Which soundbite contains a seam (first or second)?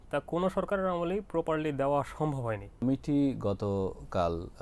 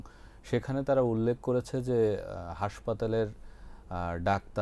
first